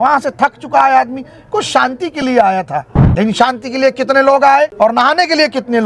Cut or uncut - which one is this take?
cut